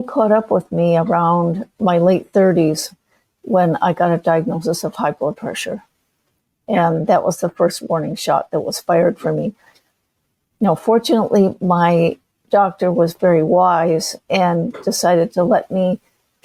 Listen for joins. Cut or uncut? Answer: uncut